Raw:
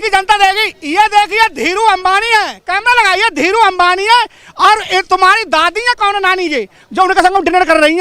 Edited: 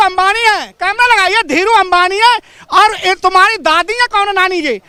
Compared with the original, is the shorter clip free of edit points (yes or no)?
yes